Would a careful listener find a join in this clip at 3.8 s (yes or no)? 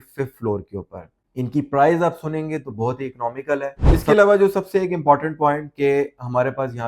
yes